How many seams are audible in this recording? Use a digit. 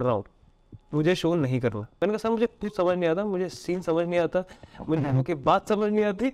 1